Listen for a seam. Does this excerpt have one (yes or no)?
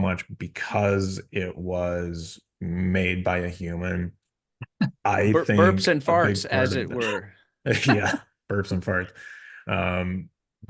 no